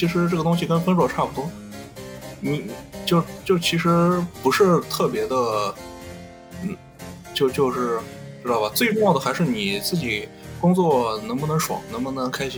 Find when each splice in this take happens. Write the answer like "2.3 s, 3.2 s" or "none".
none